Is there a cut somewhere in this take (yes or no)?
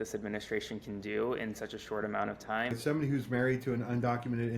yes